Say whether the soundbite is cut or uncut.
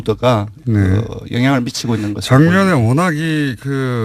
uncut